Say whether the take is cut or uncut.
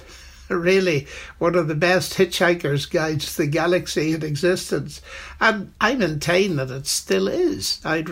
cut